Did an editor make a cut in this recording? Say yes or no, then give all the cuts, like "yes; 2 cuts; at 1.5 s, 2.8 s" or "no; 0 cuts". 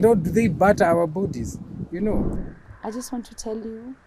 yes; 1 cut; at 2.3 s